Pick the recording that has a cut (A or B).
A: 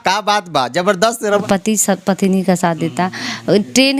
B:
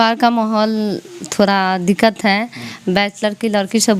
A